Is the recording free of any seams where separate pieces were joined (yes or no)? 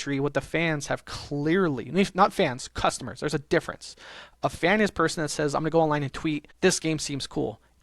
no